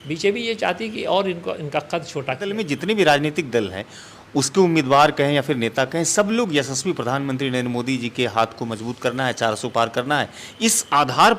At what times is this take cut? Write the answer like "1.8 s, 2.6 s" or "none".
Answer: 2.5 s